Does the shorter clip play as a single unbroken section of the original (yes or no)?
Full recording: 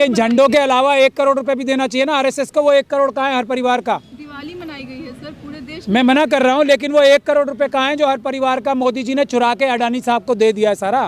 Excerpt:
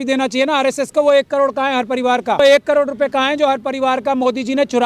no